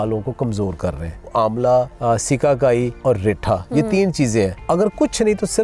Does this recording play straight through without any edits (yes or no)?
no